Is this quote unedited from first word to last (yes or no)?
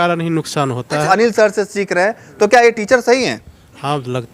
no